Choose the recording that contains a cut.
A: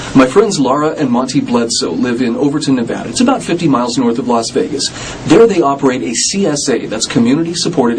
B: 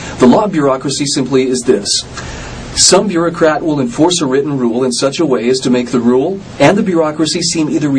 A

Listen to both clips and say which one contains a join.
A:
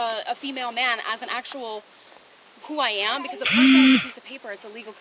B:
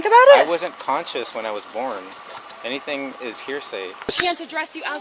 B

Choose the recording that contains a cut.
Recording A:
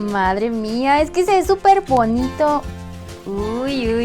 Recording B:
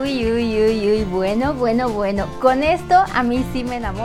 A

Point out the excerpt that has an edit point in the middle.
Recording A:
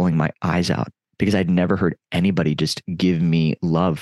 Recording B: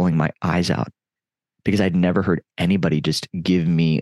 A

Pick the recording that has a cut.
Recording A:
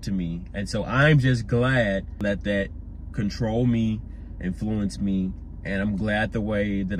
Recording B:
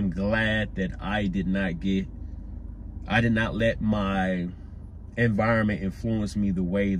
A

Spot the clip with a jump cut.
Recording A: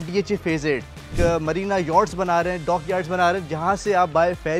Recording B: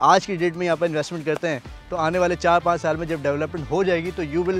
A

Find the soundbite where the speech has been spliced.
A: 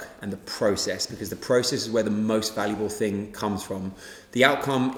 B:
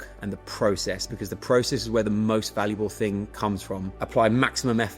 B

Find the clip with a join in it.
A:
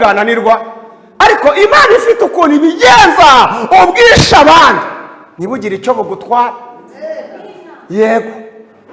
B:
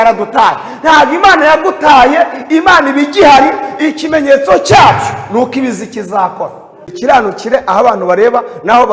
B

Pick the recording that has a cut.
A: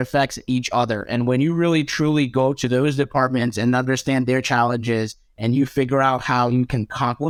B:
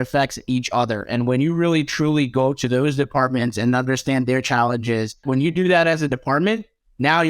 B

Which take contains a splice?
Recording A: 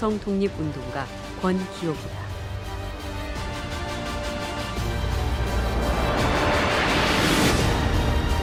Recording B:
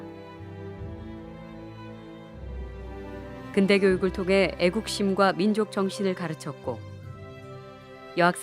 B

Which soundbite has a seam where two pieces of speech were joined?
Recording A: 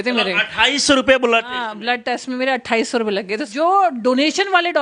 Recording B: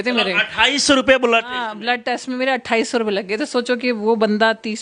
A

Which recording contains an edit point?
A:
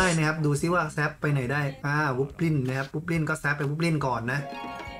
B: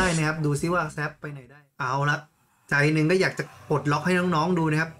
B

